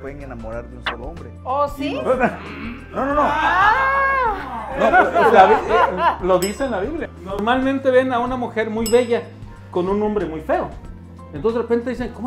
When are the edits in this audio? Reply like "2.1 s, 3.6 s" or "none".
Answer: 7.0 s

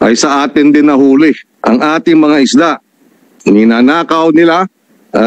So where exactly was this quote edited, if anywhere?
1.5 s

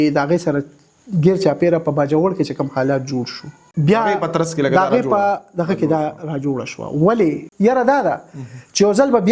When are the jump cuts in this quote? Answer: 3.6 s, 7.5 s

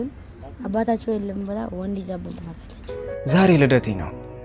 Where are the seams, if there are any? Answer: 2.9 s

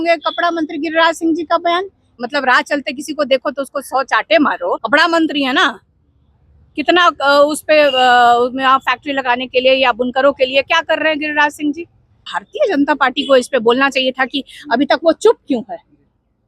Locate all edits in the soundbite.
2.1 s, 4.8 s, 12.2 s

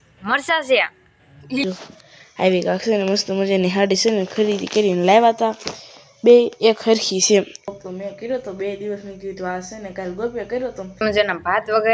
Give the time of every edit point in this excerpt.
1.6 s, 7.6 s, 11.0 s

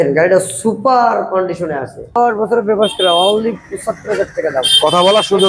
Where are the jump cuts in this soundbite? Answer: 2.0 s

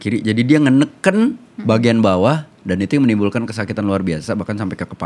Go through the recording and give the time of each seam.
none

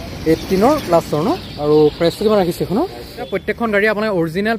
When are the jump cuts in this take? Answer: 3.3 s

